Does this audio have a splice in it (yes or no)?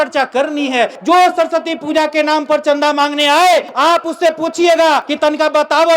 yes